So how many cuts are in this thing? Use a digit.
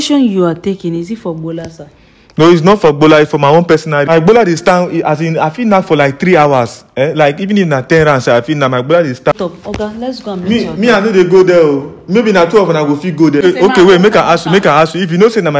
3